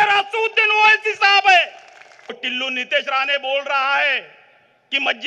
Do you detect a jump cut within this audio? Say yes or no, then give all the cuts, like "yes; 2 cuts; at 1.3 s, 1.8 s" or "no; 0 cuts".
yes; 1 cut; at 2.4 s